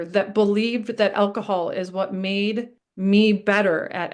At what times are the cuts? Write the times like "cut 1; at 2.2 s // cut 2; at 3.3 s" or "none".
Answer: cut 1; at 2.8 s